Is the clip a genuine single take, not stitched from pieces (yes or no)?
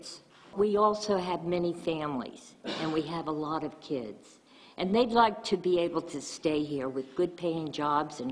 yes